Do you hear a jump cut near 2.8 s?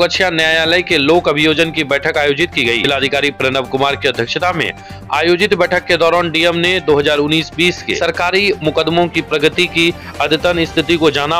yes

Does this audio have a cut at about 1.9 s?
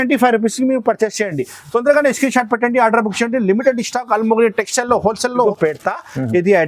no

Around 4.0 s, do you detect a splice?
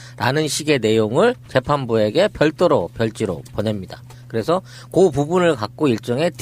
no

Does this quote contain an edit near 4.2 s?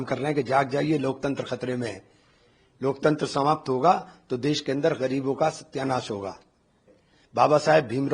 no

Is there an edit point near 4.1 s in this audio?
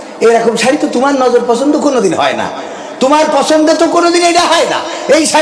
no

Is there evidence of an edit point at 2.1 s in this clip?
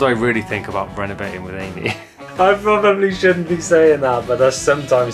yes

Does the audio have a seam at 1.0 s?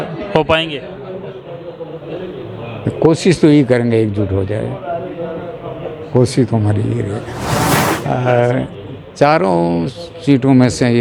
no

